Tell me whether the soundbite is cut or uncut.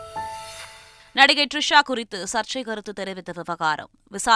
uncut